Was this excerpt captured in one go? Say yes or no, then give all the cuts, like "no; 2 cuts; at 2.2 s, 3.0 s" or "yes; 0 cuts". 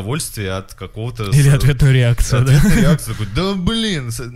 yes; 0 cuts